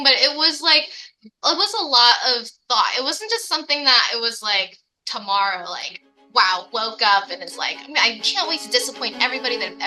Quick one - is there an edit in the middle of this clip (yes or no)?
no